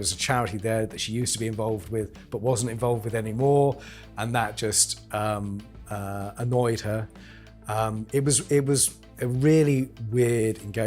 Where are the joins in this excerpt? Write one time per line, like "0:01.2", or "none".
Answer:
none